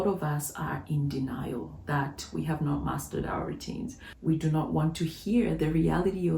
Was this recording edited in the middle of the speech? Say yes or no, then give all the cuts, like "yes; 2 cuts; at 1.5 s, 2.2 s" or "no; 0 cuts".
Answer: yes; 1 cut; at 4.1 s